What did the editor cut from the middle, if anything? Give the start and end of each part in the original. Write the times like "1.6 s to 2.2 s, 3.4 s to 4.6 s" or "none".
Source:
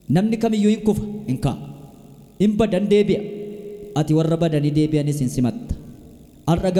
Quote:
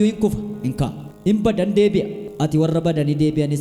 1.7 s to 2.2 s, 3.4 s to 3.8 s

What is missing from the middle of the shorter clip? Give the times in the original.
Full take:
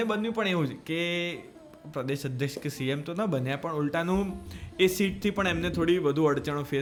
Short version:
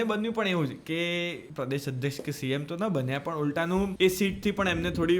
1.4 s to 1.8 s, 4.3 s to 4.7 s

